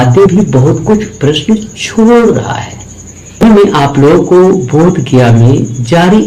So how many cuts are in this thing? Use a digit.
1